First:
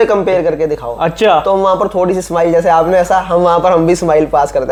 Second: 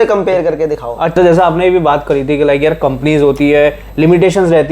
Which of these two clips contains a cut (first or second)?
second